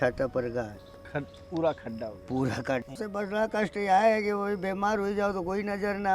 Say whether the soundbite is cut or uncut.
cut